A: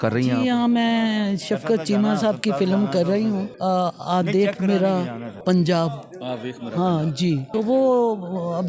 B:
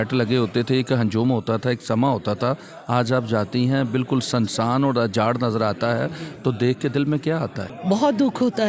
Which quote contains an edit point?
A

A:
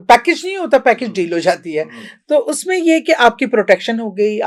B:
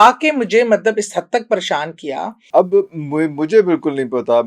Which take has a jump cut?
B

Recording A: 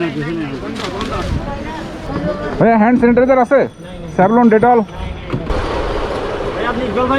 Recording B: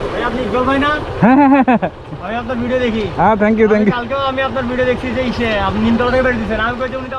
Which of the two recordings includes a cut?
A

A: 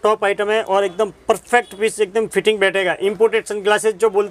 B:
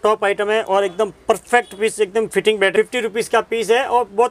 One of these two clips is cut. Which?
B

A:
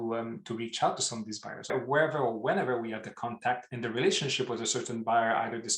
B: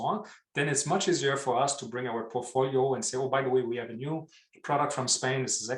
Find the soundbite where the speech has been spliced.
A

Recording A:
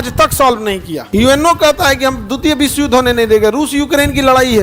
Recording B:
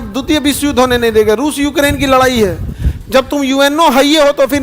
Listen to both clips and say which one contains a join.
A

